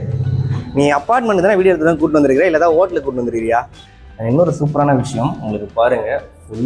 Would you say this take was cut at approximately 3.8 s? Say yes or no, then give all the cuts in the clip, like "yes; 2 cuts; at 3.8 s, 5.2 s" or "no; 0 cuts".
yes; 1 cut; at 3.8 s